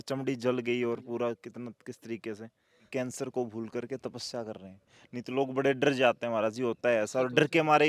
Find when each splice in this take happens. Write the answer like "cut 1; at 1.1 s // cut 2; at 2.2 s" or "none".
cut 1; at 2.7 s